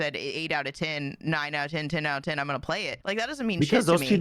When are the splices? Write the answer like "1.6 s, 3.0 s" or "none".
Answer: 2.9 s